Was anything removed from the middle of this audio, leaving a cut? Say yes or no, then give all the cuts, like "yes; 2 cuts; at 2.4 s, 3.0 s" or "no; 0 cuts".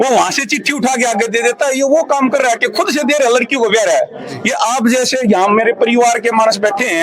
no; 0 cuts